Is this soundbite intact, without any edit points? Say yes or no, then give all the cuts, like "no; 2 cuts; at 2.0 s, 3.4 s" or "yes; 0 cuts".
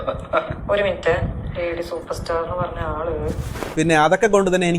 no; 1 cut; at 3.7 s